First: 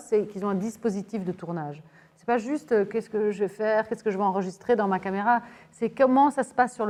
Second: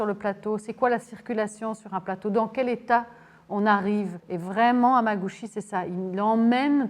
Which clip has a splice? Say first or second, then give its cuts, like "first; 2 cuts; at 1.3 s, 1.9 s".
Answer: second; 1 cut; at 4.2 s